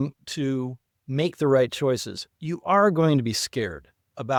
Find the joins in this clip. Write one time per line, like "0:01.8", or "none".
none

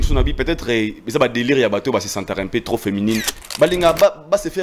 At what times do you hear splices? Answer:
0:03.4

